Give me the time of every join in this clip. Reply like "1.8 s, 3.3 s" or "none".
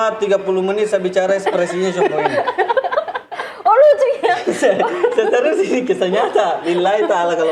none